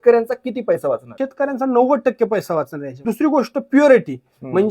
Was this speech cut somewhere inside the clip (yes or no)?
yes